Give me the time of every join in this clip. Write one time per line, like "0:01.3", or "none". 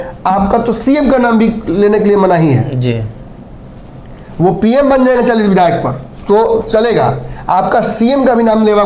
none